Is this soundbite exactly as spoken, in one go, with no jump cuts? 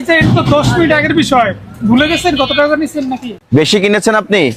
yes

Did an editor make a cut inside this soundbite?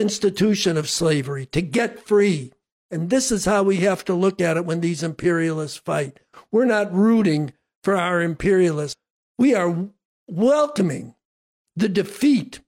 yes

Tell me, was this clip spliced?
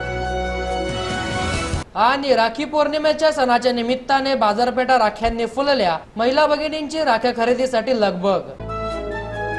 no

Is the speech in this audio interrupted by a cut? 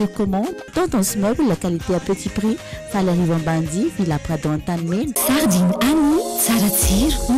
yes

